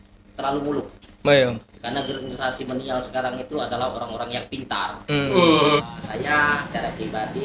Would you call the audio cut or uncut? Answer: cut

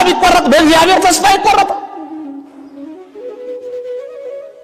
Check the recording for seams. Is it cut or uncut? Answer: uncut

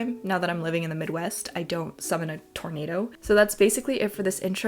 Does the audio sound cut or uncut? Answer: uncut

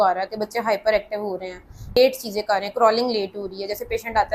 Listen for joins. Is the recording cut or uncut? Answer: cut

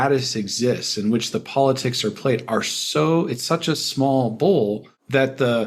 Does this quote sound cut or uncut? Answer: uncut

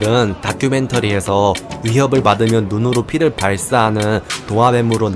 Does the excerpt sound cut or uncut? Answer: uncut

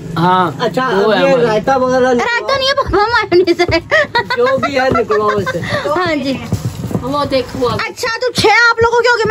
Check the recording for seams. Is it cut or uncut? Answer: cut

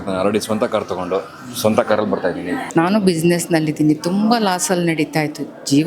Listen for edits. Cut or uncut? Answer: cut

